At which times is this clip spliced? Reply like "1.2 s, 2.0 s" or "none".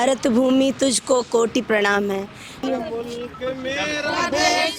2.5 s